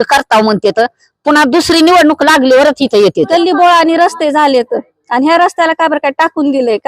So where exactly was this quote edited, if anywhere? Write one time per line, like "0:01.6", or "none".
0:03.3